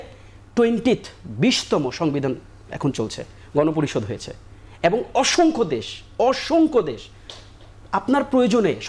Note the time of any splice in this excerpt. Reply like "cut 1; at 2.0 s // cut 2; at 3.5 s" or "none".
none